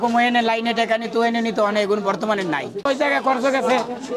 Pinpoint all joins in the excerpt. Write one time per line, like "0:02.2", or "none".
0:02.9

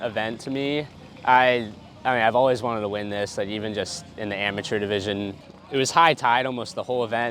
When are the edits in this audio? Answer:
0:05.4

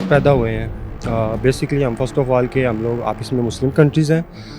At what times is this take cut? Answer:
none

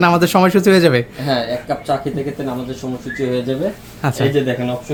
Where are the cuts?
none

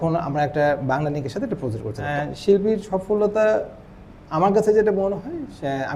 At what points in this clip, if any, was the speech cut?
0:02.1

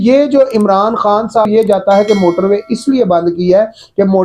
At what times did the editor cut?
0:01.5

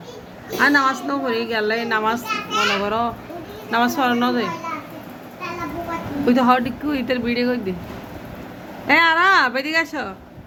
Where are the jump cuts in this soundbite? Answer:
none

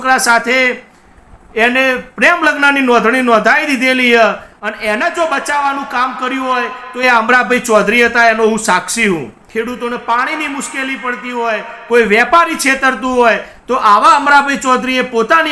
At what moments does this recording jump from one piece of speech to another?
0:09.4

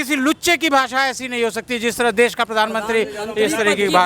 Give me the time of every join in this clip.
none

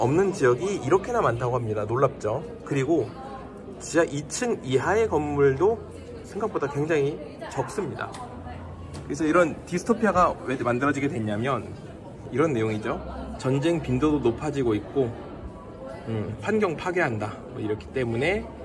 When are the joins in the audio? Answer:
none

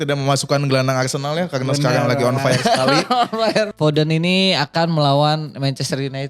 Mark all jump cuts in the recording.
0:03.7

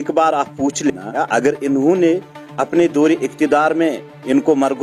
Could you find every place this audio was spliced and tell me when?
0:01.1

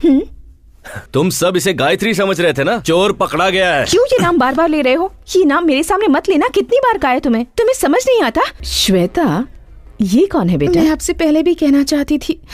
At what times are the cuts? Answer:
0:01.0
0:02.8
0:08.6

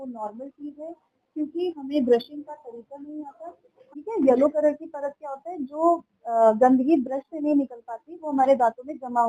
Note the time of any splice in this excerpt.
0:03.8

